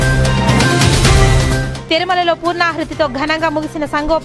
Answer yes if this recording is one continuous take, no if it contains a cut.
no